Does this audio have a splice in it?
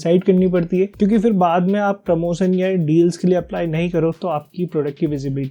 no; 0 cuts

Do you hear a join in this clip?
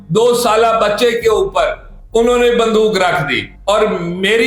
no; 0 cuts

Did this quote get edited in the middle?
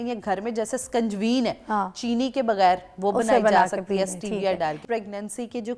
yes; 1 cut; at 4.8 s

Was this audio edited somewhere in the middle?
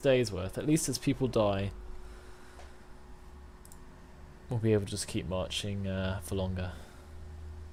no; 0 cuts

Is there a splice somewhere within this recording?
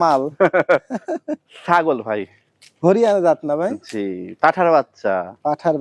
no; 0 cuts

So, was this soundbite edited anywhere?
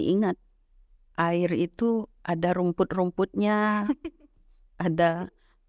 no; 0 cuts

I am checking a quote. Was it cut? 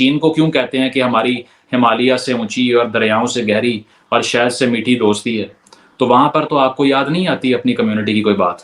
no; 0 cuts

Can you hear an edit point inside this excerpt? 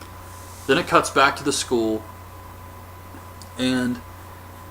yes; 1 cut; at 1.4 s

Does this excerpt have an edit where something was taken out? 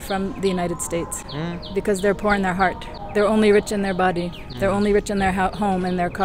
yes; 1 cut; at 2.9 s

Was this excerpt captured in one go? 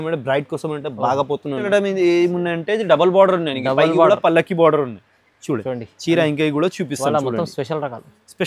no; 1 cut; at 1.7 s

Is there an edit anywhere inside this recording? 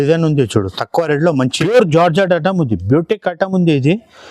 yes; 1 cut; at 1.6 s

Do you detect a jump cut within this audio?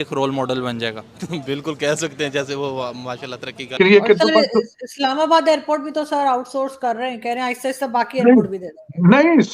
yes; 1 cut; at 3.7 s

